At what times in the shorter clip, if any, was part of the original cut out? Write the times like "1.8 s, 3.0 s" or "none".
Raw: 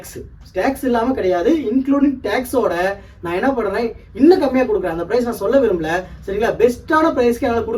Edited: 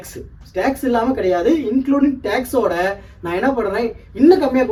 none